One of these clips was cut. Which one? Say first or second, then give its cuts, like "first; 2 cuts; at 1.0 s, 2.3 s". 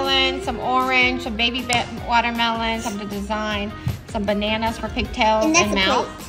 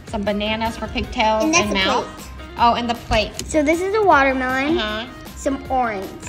second; 2 cuts; at 3.4 s, 5.2 s